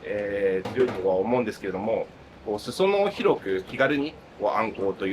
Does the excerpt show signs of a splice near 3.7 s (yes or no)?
yes